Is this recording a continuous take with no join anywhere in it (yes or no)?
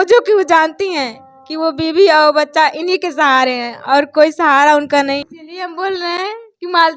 no